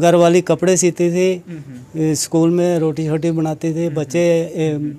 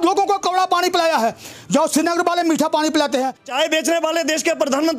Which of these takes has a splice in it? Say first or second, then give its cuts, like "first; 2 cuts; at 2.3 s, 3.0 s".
second; 1 cut; at 3.4 s